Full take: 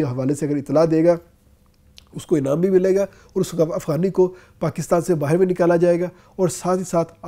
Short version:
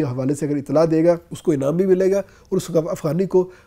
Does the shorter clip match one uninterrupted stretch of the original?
no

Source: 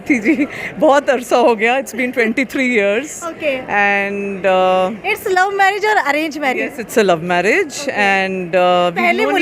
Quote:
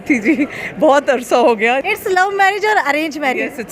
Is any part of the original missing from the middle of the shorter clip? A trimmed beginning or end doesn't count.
yes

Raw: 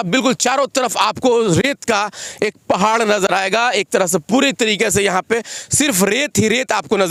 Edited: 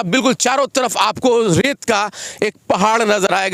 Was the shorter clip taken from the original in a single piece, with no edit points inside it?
yes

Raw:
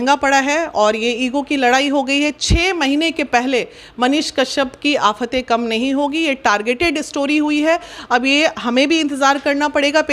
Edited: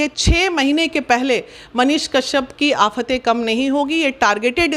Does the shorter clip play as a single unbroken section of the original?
yes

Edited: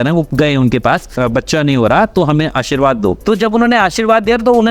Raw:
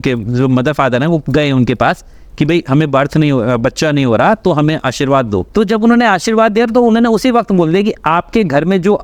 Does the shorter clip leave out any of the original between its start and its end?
yes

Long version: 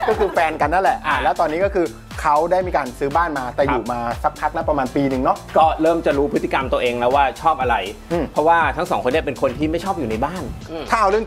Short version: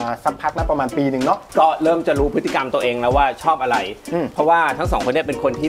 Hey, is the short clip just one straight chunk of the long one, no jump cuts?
yes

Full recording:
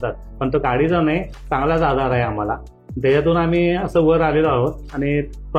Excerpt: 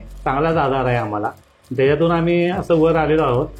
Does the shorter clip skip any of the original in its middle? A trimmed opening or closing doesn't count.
no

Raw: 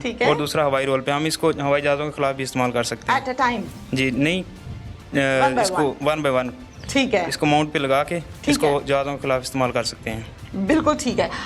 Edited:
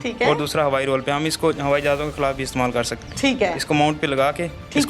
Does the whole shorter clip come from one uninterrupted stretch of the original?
no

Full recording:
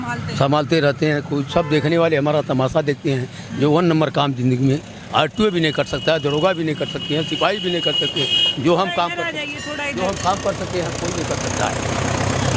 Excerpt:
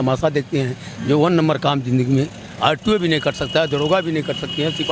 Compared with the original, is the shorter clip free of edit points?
yes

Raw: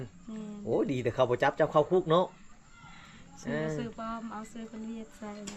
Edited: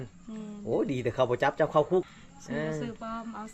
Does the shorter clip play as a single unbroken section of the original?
no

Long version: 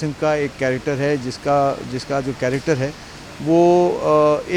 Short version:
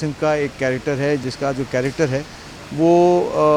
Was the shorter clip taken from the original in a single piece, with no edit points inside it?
no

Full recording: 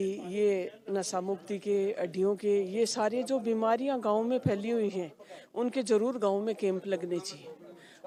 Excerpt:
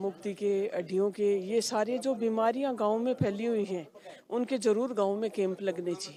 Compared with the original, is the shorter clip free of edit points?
yes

